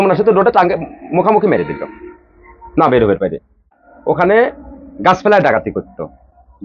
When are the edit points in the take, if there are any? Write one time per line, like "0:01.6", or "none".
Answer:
0:03.9